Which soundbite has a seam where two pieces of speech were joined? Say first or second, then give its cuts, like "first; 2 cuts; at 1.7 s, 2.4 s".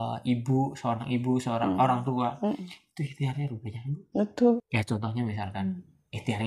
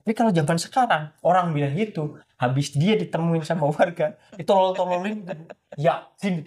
first; 1 cut; at 4.6 s